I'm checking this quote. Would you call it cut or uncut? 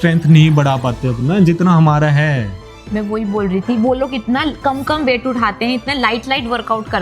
uncut